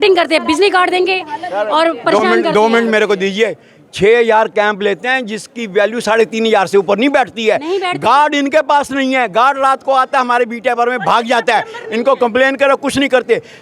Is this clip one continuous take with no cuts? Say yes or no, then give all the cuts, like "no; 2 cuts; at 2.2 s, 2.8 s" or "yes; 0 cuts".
yes; 0 cuts